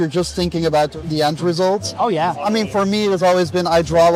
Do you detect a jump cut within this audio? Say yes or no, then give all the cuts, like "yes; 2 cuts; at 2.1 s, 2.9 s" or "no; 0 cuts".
no; 0 cuts